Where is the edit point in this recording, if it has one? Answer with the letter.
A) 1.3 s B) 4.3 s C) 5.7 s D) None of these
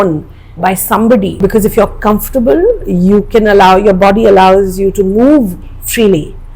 A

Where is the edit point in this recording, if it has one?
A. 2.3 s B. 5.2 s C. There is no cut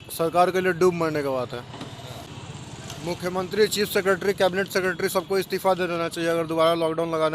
A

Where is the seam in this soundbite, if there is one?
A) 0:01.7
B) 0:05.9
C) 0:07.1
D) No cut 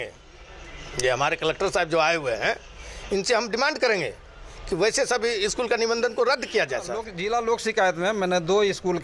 C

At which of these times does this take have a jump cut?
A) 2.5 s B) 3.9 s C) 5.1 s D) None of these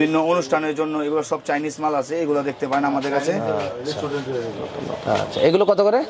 D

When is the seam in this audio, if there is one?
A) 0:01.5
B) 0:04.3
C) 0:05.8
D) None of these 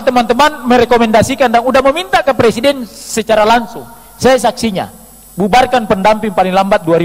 D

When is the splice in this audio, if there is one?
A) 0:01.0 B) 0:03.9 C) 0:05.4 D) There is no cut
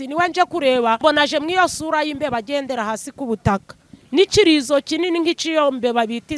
A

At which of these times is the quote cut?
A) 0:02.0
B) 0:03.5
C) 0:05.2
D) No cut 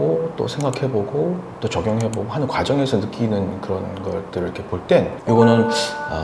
C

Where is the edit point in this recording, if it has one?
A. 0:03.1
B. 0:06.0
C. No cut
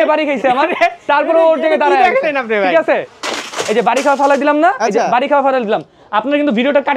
A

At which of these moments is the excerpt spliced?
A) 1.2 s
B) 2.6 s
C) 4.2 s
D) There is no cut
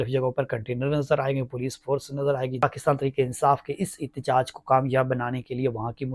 B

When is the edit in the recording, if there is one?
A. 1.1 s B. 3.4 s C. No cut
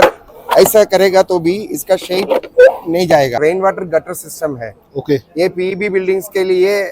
B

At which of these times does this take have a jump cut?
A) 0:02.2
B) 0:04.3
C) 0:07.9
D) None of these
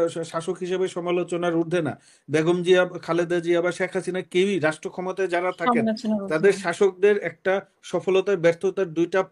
D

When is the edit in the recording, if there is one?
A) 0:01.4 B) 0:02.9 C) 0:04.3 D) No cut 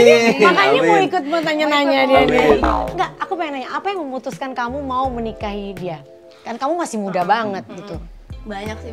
B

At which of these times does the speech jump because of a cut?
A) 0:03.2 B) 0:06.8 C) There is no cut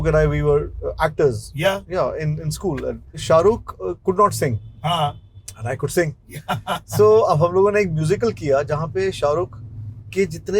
A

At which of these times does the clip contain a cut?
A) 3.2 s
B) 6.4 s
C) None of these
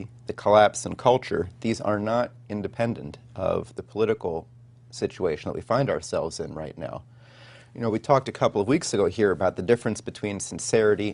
C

